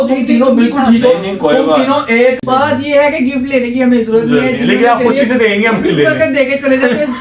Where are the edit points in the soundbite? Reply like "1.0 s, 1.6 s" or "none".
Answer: 2.4 s